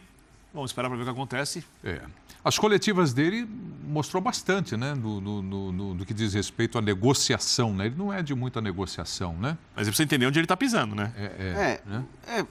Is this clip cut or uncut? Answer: uncut